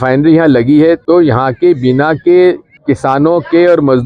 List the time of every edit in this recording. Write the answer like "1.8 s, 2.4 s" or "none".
1.0 s, 2.7 s